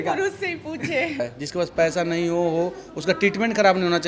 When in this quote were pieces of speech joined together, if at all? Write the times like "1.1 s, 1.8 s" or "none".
1.2 s